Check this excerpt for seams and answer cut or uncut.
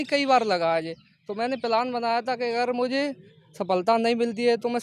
uncut